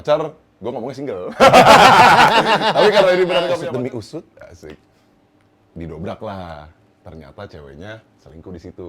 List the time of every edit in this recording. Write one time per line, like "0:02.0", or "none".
0:03.5